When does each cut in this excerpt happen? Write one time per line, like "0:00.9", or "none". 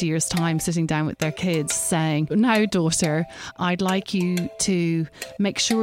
0:02.3
0:03.5